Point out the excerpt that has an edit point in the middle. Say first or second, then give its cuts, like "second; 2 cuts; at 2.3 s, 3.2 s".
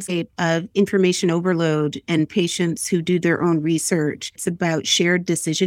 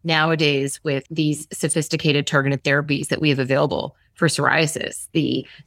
second; 1 cut; at 1.1 s